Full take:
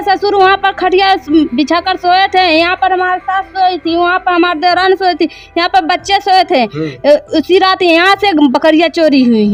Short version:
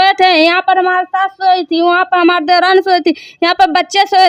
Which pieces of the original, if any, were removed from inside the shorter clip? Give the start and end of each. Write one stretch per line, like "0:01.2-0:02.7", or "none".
none